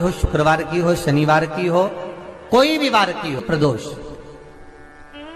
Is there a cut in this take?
yes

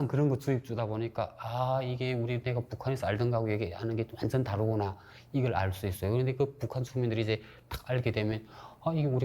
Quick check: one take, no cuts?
yes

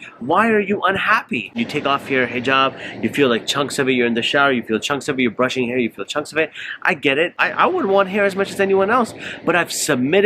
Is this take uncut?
no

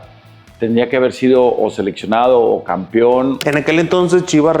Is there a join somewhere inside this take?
yes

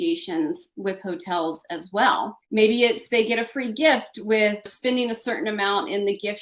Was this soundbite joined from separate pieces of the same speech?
yes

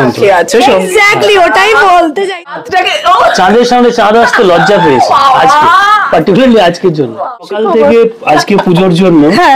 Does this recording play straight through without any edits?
no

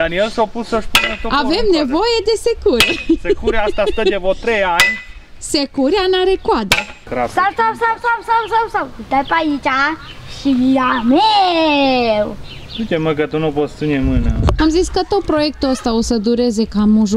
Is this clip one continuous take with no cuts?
no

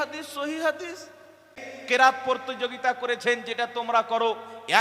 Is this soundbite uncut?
no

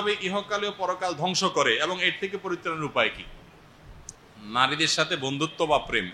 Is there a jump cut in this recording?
no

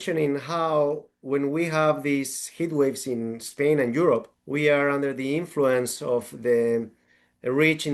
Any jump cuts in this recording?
no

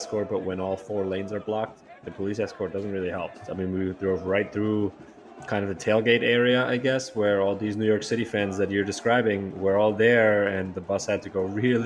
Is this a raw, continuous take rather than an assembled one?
no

